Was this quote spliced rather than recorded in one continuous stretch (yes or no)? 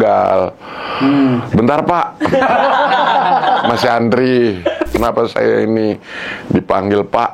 yes